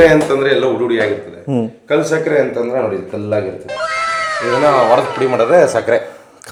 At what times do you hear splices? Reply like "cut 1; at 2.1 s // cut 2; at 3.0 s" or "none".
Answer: none